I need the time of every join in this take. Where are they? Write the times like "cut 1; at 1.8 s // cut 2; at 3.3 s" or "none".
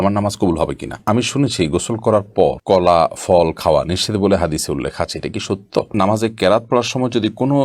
cut 1; at 1.0 s // cut 2; at 5.9 s